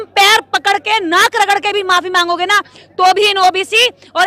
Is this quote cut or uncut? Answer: uncut